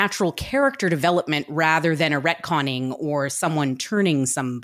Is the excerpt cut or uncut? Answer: uncut